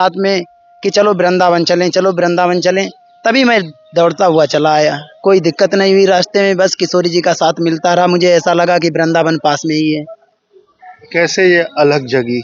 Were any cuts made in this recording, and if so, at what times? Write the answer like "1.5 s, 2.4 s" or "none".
none